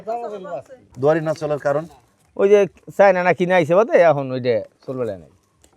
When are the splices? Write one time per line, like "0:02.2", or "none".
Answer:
0:00.9

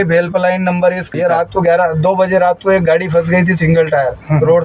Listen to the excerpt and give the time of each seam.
0:01.0

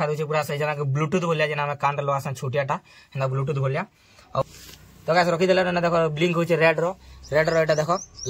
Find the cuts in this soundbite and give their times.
0:04.4

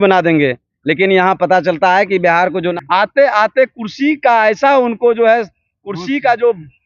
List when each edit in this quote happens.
0:02.7

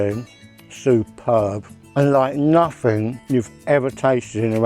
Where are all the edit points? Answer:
0:03.2

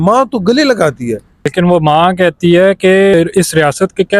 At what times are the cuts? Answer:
0:01.4
0:03.1

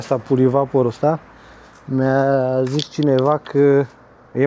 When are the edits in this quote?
none

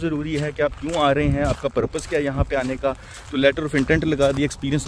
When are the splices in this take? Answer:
none

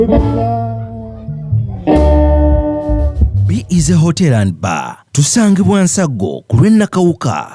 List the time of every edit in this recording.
0:03.4

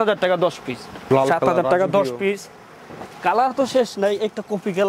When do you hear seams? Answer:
0:01.1

